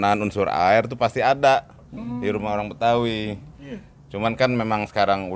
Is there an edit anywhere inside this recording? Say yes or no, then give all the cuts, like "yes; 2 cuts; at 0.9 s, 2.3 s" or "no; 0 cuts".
no; 0 cuts